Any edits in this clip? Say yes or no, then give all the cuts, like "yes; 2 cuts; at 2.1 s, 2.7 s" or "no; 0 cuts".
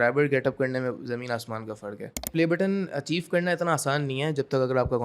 yes; 1 cut; at 2.3 s